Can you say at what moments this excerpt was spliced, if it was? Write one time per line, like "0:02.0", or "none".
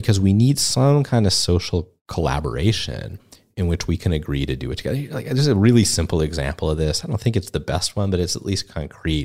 none